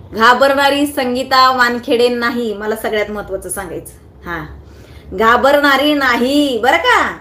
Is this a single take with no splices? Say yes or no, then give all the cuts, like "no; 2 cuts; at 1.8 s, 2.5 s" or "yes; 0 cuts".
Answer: yes; 0 cuts